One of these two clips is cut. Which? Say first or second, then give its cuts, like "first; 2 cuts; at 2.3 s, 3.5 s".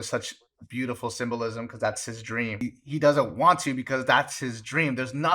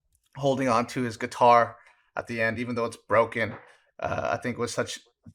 first; 1 cut; at 2.6 s